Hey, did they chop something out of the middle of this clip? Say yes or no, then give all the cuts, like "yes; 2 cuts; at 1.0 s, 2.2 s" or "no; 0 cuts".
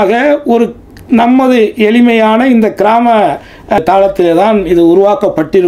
yes; 1 cut; at 3.8 s